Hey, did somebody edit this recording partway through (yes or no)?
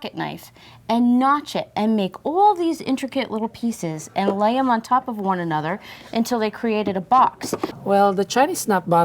yes